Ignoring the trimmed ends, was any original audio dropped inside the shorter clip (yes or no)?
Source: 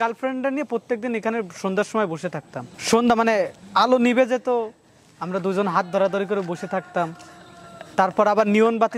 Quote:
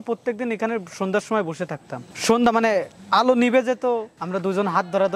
yes